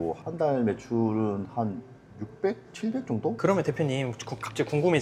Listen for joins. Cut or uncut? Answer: uncut